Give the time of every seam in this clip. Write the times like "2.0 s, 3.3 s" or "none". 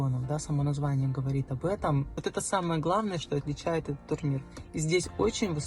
2.1 s